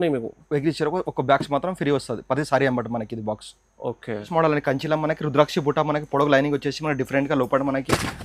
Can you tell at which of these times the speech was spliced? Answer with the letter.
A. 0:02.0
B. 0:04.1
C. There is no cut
B